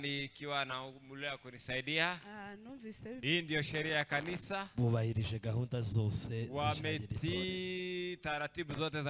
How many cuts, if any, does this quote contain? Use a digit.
1